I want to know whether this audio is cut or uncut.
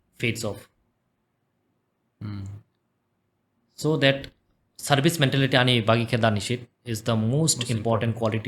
uncut